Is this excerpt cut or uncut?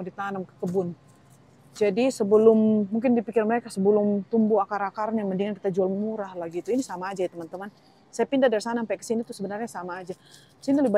uncut